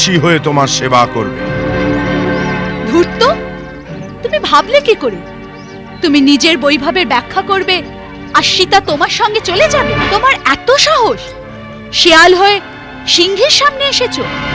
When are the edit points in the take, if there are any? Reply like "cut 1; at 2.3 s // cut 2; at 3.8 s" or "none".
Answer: cut 1; at 9.9 s